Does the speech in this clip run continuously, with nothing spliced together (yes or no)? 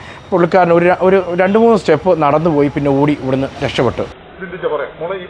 no